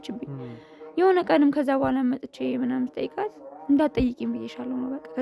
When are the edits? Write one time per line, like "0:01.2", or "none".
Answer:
none